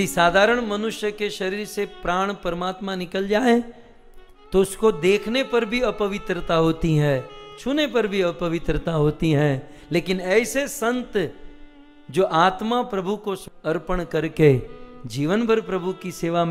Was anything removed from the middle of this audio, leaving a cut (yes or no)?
yes